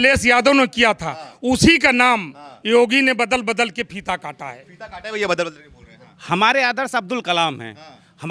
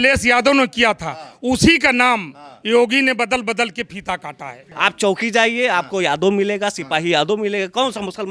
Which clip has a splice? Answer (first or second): second